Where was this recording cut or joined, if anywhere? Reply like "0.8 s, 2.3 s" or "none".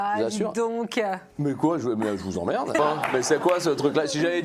1.3 s, 2.8 s